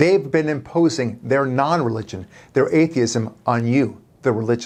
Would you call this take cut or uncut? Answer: uncut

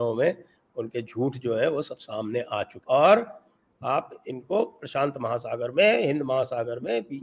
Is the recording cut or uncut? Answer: cut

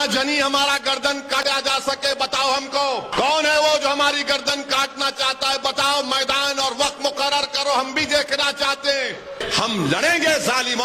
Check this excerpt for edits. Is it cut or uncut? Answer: cut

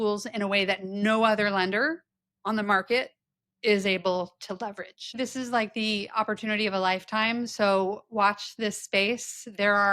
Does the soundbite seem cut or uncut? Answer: cut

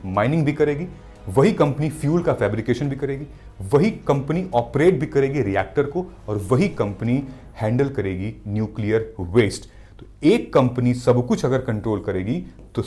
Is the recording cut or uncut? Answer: uncut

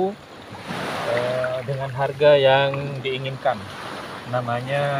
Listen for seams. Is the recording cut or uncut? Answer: uncut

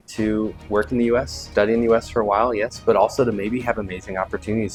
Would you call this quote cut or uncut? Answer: uncut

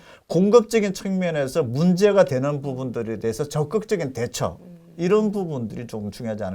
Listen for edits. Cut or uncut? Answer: uncut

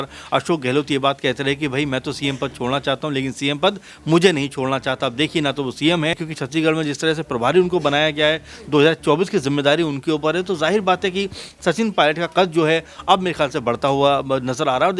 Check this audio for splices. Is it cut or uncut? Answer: cut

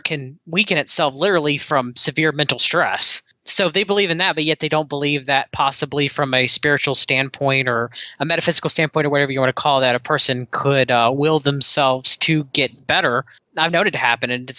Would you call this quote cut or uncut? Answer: cut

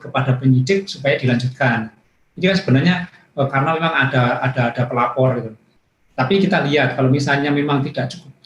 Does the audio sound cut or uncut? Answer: uncut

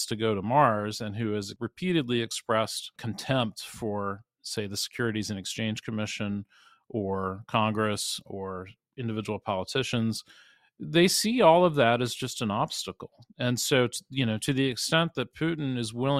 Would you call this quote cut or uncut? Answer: cut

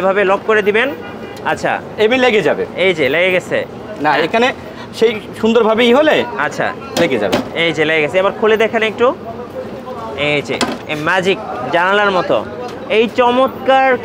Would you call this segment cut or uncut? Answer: uncut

